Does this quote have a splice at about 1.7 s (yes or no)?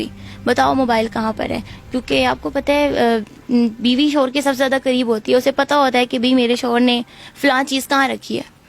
no